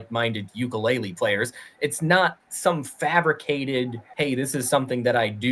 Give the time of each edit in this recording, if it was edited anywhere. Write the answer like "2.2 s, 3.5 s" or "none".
2.5 s, 4.0 s